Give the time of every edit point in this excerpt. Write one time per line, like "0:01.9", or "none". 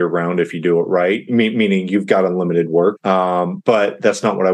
none